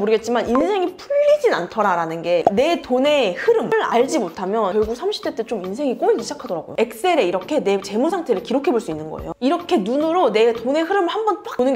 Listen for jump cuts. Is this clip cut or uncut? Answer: cut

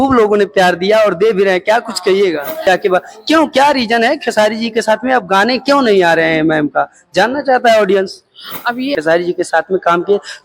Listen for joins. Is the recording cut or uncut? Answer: cut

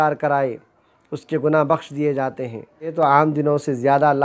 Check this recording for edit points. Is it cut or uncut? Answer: cut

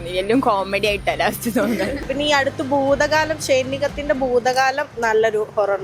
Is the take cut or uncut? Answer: cut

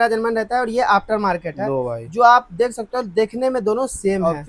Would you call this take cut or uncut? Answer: uncut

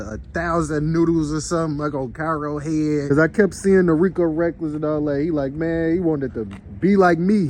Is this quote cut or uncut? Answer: cut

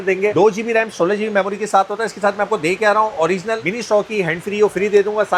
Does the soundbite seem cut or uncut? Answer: uncut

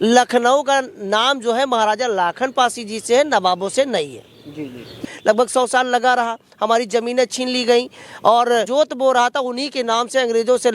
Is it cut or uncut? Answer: cut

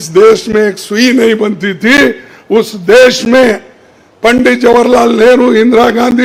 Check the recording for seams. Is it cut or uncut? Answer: uncut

